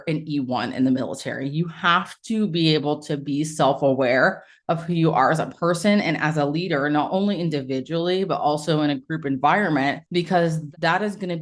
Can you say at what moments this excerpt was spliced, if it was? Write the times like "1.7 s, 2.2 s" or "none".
10.4 s